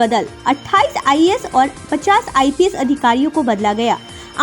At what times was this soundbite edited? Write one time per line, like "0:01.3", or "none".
none